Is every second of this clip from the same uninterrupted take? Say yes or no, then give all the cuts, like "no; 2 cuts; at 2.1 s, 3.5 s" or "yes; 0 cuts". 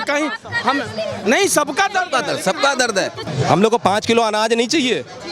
no; 1 cut; at 3.3 s